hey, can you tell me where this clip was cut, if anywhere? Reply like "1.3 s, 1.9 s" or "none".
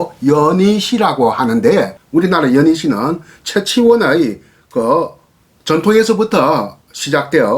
2.0 s

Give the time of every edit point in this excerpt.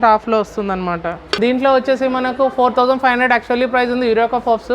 1.3 s

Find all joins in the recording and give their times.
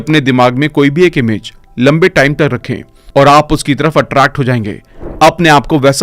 4.8 s

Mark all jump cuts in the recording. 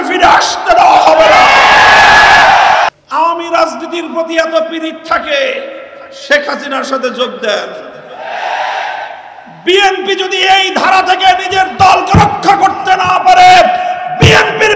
2.9 s

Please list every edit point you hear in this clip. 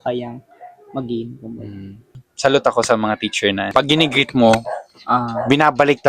2.2 s, 3.7 s

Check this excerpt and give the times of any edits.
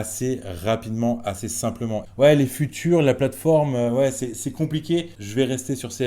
2.0 s, 5.2 s

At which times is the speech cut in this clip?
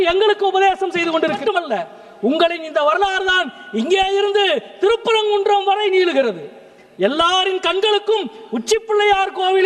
1.4 s

